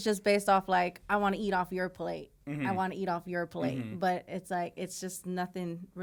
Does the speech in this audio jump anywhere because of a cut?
no; 0 cuts

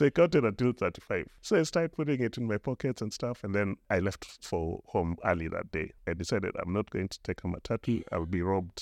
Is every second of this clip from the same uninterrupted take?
no; 4 cuts; at 1.3 s, 3.8 s, 4.8 s, 5.9 s

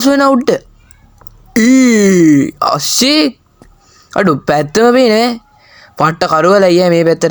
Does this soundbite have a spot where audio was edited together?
no; 0 cuts

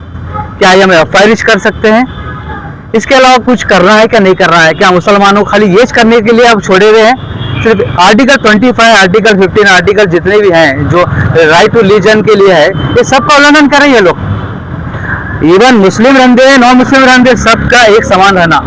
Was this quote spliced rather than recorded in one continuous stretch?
no; 0 cuts

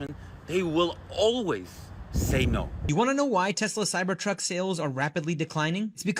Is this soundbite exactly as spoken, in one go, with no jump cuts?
no; 1 cut; at 2.8 s

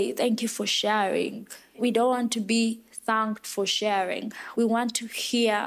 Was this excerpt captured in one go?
no; 2 cuts; at 1.8 s, 4.4 s

